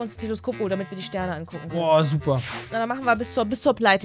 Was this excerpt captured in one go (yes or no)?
no